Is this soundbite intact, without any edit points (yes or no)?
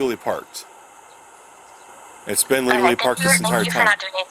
no